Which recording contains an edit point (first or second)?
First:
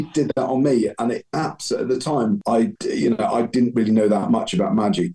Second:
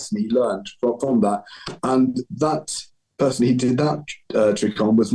first